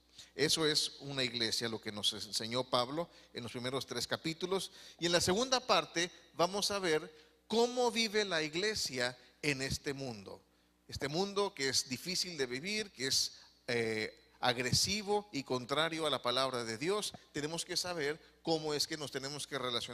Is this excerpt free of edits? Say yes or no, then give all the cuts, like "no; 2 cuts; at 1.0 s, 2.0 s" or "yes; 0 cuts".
no; 1 cut; at 1.8 s